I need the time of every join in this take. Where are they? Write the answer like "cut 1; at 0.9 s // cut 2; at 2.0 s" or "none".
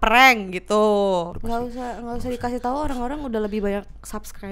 cut 1; at 1.4 s